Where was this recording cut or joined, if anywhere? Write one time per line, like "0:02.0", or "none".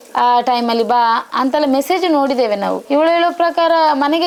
none

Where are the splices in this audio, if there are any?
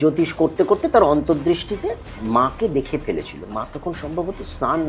0:02.1

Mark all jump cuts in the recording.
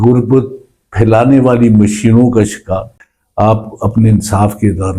0:03.0

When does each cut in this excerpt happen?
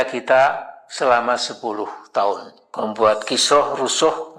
0:02.6

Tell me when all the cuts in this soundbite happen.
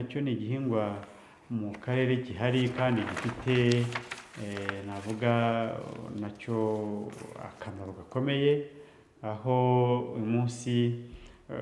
none

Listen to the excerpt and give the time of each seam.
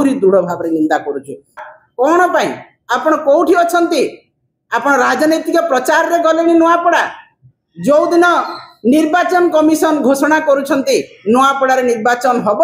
0:01.6

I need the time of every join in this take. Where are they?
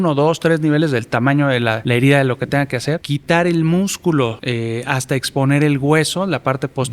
0:01.8
0:03.1
0:04.4

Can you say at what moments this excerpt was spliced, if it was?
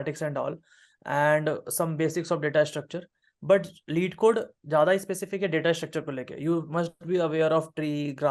none

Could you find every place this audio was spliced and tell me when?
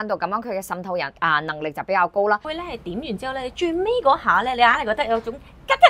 0:02.4

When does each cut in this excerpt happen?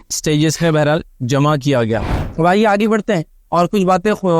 0:02.1

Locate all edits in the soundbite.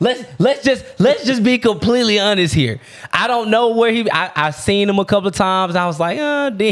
none

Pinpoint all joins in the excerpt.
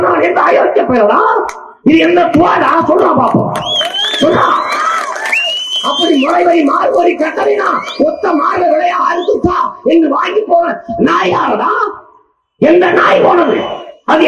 none

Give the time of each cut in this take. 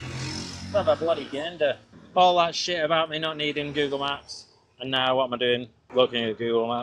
0:01.9
0:05.8

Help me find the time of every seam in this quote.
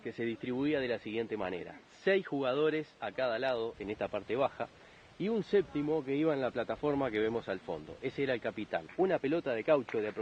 0:08.9

